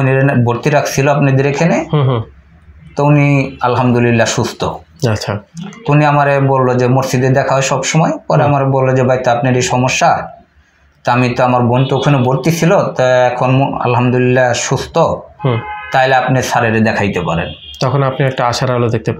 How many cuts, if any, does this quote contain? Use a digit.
0